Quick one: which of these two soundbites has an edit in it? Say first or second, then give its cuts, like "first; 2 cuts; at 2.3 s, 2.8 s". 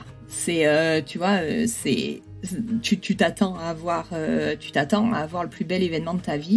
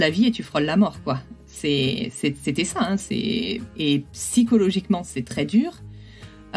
second; 1 cut; at 3.6 s